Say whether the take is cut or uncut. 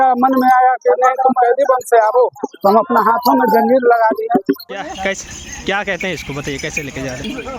cut